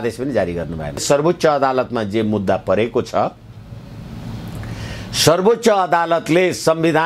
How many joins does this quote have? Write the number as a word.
one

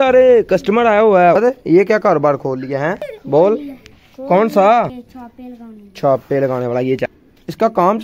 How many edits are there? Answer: one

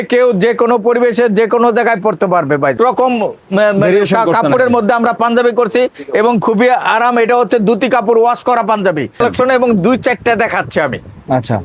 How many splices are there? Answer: two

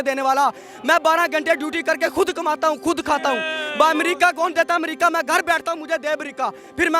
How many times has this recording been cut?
zero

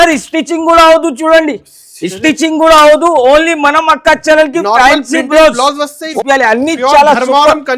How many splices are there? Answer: one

